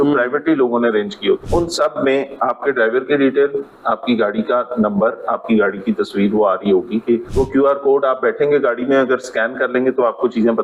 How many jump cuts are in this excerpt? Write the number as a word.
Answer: two